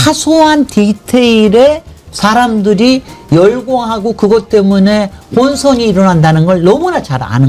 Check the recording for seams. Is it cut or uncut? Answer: uncut